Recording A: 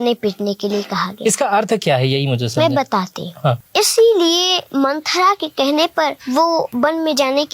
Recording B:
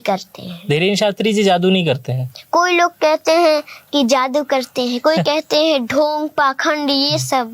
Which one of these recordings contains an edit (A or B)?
A